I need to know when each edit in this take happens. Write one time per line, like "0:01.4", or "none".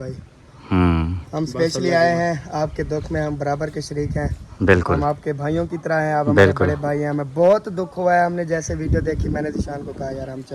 none